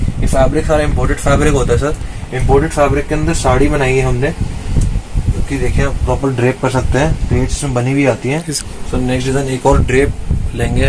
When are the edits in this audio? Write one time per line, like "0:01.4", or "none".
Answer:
0:08.5